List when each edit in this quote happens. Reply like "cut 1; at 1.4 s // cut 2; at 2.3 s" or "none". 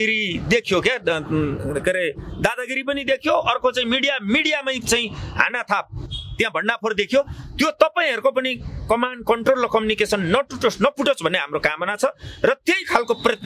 none